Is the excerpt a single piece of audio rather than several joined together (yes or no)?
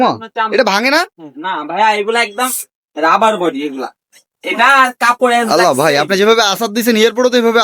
yes